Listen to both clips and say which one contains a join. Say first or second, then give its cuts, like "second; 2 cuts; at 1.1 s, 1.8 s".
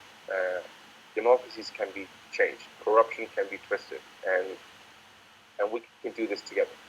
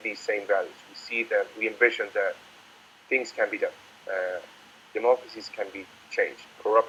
first; 1 cut; at 5.9 s